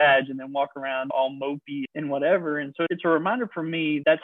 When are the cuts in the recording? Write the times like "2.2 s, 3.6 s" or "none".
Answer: none